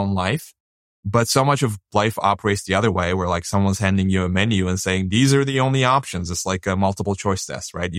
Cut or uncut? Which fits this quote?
cut